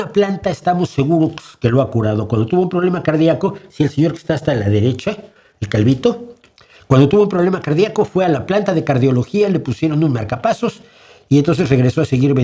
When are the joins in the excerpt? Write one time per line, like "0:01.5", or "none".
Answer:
none